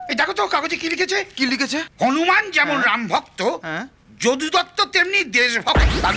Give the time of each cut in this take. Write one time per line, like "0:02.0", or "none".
0:01.9